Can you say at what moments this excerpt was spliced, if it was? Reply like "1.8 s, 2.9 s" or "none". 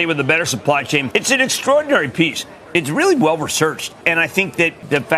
1.1 s, 4.2 s